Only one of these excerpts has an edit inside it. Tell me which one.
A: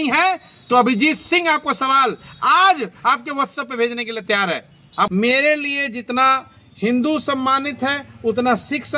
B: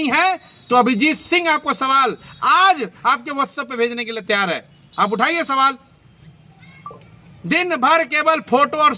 A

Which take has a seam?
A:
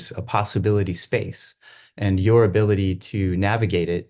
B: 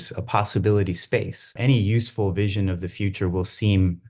B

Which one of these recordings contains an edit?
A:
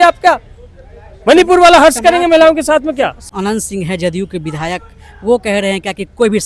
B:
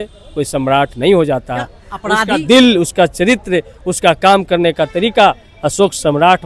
A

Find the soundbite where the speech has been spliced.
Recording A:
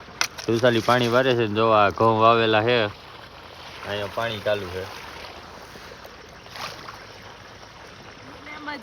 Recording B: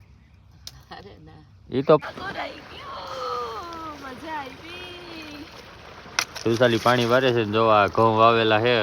B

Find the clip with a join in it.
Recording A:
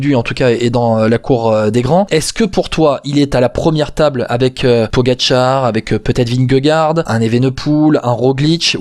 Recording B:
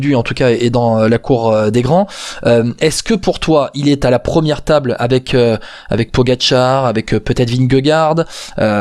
A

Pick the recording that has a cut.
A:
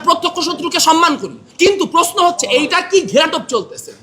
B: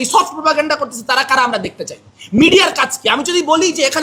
A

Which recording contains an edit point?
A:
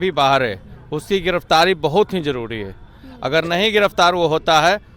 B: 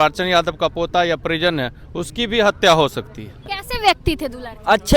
B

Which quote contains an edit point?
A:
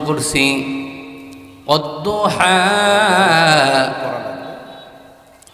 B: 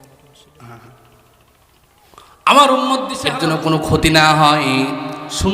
B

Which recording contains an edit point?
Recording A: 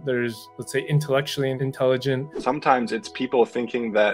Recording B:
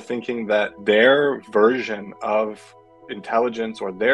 A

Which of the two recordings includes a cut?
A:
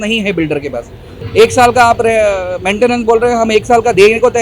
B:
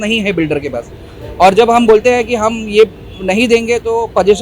A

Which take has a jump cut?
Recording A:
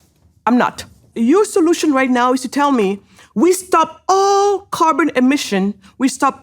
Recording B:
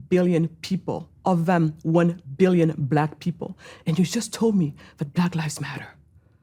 A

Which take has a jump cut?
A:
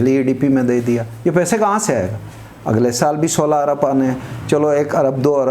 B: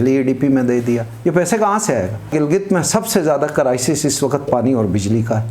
B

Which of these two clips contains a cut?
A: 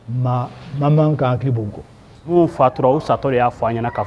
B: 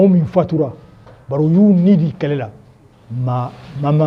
A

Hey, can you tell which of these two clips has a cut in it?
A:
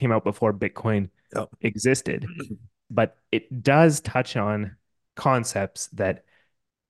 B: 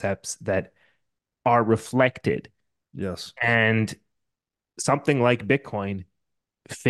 A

